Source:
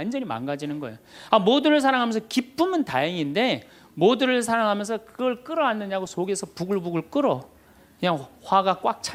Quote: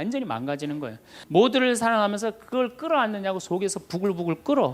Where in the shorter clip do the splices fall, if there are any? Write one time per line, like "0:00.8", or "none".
0:01.1